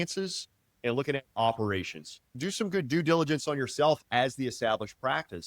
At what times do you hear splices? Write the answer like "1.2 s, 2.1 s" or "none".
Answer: 2.5 s